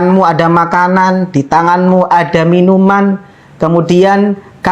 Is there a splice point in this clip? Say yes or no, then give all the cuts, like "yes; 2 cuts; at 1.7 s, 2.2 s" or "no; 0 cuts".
no; 0 cuts